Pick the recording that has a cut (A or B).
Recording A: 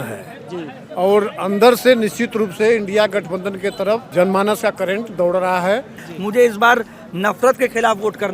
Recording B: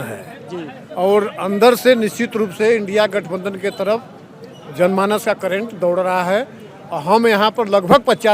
A